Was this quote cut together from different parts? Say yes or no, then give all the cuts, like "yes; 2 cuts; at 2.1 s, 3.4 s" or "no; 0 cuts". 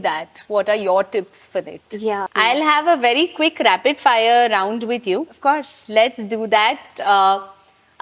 yes; 1 cut; at 2.3 s